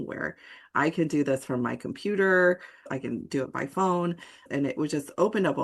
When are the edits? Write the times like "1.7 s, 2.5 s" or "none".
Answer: 2.8 s, 4.3 s